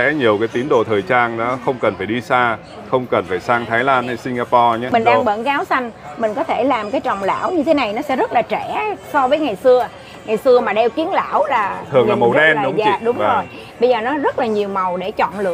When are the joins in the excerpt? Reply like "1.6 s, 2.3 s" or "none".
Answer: 4.9 s